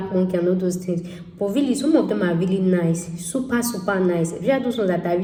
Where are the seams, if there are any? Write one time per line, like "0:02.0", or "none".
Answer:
none